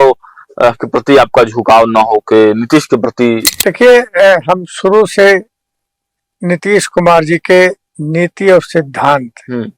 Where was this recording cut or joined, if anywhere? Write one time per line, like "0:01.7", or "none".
0:03.4